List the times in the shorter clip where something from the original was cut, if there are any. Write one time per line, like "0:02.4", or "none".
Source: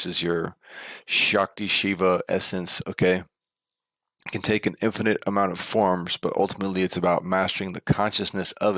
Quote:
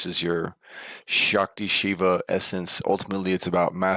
0:02.8